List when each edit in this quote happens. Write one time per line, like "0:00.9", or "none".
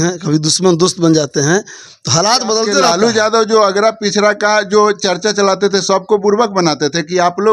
0:02.8